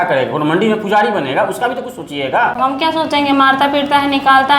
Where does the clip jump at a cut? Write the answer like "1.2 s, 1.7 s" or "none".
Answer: 2.5 s